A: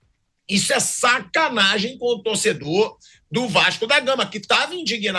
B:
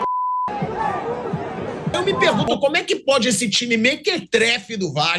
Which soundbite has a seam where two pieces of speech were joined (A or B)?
B